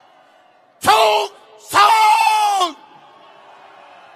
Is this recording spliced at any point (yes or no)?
no